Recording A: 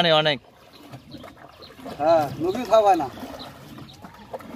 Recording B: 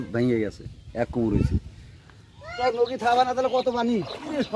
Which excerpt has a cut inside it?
B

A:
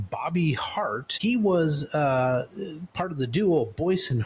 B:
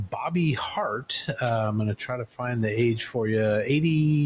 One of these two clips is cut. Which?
A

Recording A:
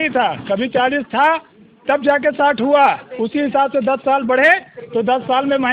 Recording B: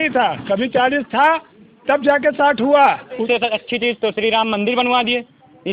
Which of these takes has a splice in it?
B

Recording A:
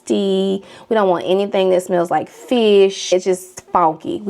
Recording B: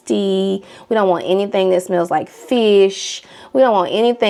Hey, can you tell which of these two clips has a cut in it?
A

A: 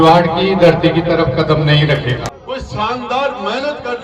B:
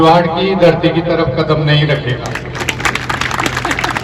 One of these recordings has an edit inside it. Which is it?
A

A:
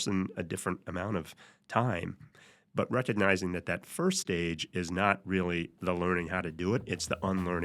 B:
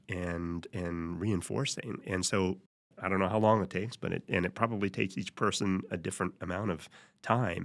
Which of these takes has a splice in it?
B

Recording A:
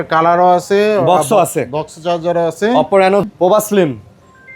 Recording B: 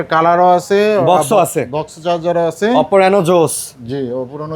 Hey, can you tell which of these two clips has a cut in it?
A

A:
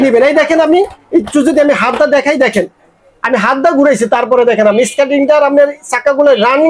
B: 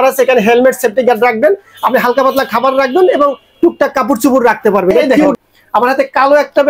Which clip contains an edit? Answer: B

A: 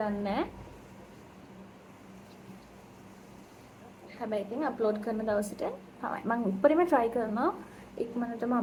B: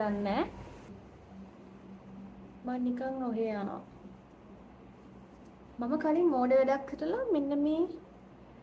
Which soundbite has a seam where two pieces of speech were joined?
B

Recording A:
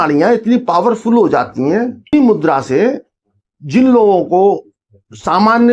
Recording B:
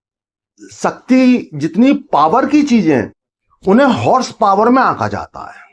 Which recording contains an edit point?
A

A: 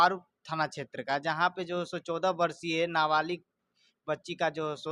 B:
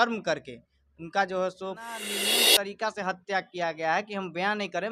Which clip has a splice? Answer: B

